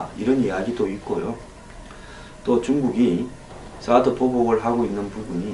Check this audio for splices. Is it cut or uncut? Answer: cut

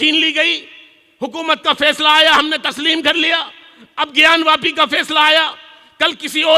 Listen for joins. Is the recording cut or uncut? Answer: uncut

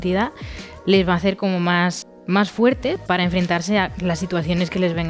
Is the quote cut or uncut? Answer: cut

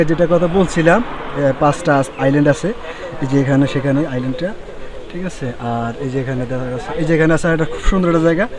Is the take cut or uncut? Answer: cut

